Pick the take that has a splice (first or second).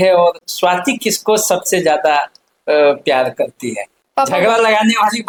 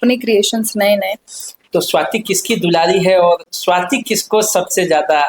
second